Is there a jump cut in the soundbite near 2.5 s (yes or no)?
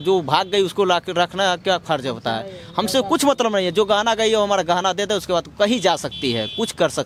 no